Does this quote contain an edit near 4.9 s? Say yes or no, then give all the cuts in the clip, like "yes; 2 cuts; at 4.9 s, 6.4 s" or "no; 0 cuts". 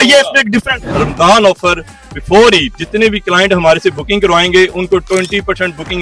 no; 2 cuts; at 1.0 s, 2.8 s